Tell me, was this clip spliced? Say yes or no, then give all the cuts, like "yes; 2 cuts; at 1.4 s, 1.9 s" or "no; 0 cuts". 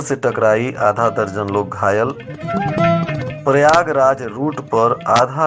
no; 0 cuts